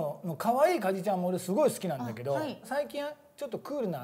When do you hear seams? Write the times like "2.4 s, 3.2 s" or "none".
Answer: 2.7 s

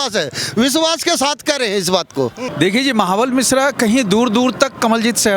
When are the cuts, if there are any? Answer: 2.4 s

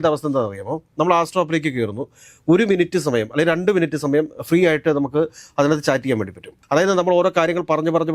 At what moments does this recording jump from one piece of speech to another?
6.5 s

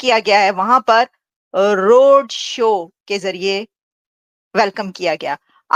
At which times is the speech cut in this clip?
none

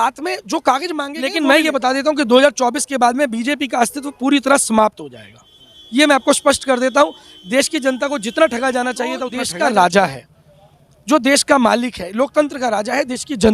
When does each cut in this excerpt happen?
1.2 s, 9.5 s

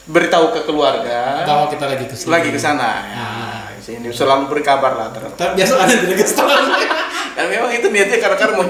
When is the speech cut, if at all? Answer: none

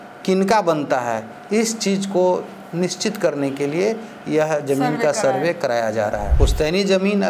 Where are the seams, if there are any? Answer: 6.3 s

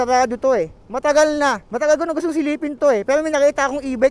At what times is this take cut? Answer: 1.7 s

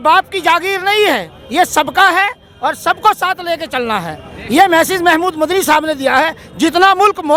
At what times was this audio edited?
none

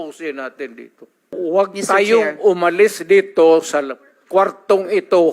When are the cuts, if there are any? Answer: 1.3 s

